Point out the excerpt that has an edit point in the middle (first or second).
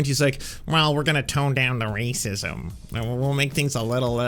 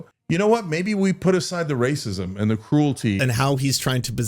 second